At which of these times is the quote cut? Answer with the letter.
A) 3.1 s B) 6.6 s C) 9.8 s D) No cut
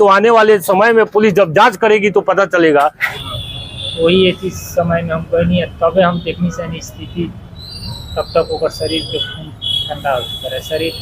A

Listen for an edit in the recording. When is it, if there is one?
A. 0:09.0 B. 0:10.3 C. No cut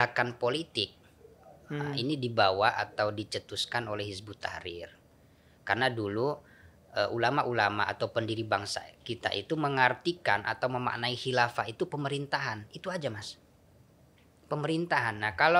C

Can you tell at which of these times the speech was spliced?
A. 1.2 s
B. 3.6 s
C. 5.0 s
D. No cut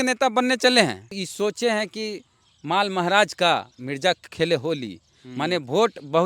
A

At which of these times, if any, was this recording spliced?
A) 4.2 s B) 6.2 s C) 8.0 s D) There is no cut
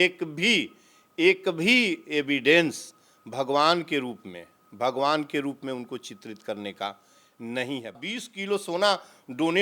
C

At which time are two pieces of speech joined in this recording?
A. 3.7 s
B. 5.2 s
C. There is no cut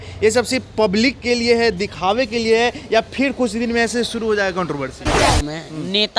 B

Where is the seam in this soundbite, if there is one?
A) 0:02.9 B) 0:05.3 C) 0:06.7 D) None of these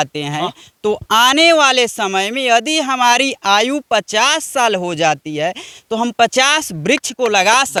D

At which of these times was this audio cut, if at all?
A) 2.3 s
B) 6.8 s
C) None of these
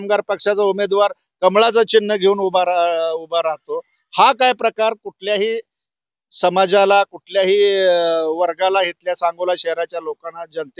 C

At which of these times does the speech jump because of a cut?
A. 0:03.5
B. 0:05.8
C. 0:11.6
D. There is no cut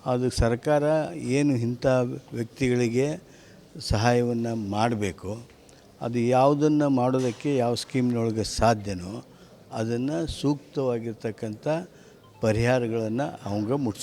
B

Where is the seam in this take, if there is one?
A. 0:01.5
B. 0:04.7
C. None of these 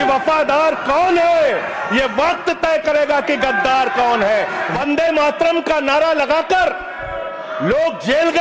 B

